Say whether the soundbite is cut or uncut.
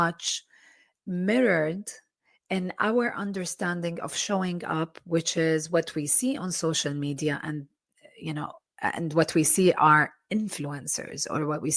uncut